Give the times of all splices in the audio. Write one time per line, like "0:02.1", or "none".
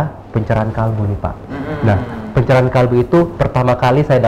none